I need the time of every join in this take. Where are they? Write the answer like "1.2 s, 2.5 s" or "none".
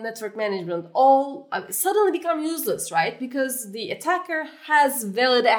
none